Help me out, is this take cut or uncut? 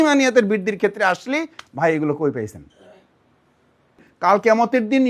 cut